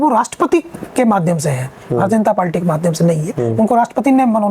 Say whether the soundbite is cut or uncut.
uncut